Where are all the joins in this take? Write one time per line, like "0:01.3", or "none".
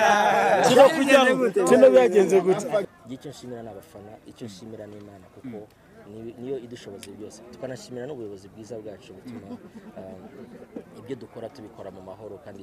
0:02.8